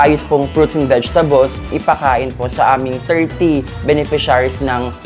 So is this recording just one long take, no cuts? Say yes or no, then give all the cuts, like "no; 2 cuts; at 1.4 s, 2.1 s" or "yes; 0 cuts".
no; 1 cut; at 1.7 s